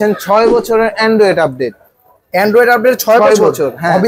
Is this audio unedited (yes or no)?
yes